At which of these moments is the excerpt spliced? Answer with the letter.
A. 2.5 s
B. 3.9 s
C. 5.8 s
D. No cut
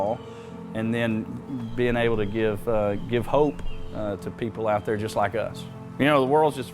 C